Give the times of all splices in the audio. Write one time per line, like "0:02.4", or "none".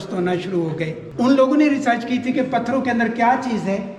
none